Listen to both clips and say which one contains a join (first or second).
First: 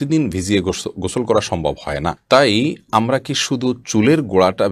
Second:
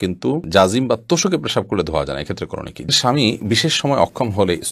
second